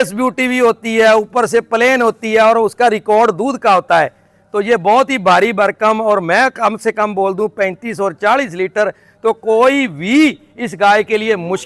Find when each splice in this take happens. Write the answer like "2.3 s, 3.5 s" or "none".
none